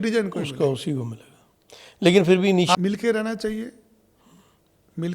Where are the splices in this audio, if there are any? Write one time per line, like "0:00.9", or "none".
0:02.7